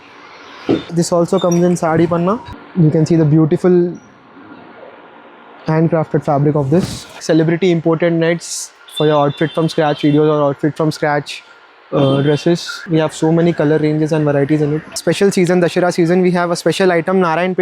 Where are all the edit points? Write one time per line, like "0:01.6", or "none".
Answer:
0:02.6
0:07.2
0:12.8
0:14.9